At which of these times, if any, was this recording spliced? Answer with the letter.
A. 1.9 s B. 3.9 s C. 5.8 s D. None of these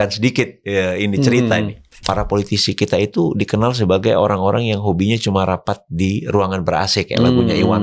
A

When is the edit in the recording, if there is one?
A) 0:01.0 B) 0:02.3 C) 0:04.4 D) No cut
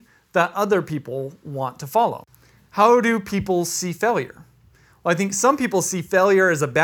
B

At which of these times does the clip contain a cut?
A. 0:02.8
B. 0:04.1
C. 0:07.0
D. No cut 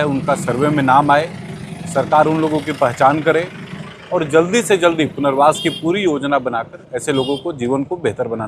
D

